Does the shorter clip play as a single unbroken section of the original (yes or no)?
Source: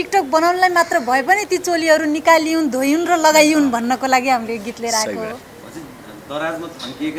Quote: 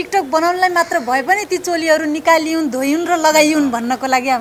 yes